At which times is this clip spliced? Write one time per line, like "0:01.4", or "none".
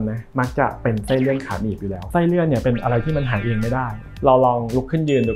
0:02.0
0:04.0